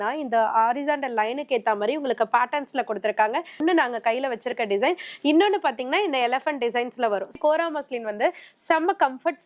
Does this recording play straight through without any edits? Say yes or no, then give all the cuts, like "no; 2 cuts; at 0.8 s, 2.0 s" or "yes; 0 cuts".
no; 2 cuts; at 3.6 s, 7.3 s